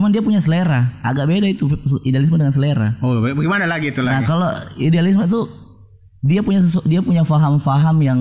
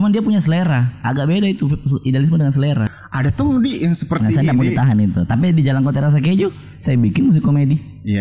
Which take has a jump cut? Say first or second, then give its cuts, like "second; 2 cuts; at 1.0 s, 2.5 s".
second; 1 cut; at 2.9 s